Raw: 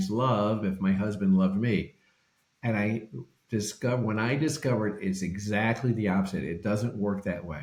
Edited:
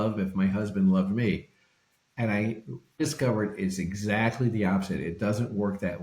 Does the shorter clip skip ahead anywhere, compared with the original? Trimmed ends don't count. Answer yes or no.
yes